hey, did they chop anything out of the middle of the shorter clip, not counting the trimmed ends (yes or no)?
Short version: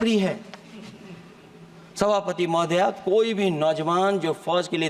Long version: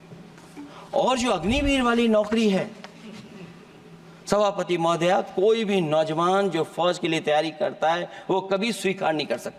no